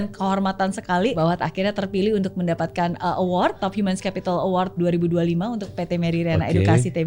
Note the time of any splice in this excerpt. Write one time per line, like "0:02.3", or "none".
0:01.2
0:03.6
0:04.8

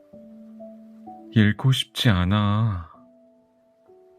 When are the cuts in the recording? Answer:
0:01.0
0:03.2

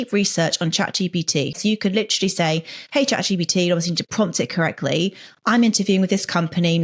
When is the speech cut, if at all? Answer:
0:01.6

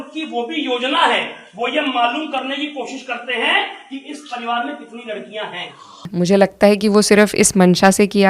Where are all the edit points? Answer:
0:06.0

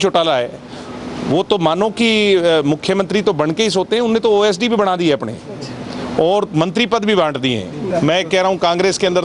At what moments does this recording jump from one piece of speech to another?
0:07.9

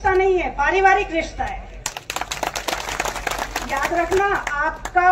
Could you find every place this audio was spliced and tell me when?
none

